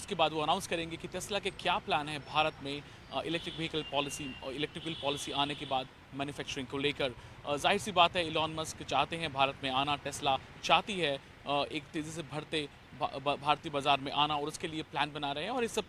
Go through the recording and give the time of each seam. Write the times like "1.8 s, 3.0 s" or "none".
1.8 s